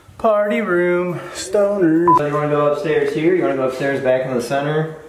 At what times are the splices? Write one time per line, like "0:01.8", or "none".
0:02.2